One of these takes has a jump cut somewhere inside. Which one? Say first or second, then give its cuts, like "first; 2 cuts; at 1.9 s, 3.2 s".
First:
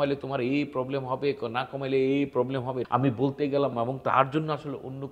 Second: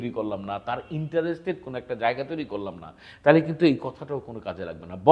first; 2 cuts; at 2.8 s, 3.7 s